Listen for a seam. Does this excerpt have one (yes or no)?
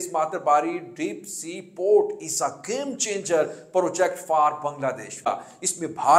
yes